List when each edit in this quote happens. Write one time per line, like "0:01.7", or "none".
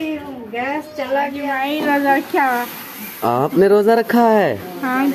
0:01.5